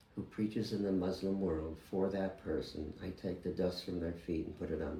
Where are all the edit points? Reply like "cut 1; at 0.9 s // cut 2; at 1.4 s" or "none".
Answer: none